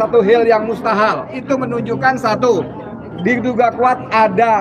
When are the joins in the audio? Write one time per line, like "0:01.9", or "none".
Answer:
0:01.3